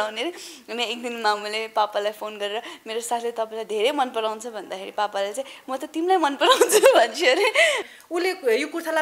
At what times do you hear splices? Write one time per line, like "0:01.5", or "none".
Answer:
0:07.8

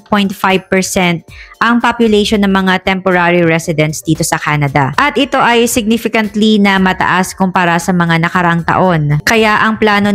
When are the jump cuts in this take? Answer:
none

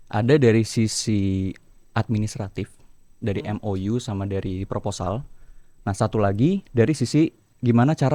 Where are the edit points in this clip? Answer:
none

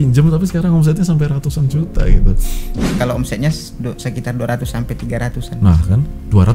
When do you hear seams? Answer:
0:02.9

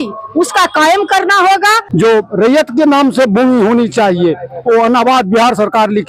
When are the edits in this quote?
0:01.8

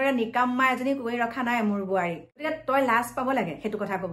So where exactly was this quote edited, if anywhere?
0:02.5

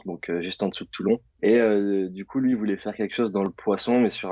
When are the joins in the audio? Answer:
0:01.3

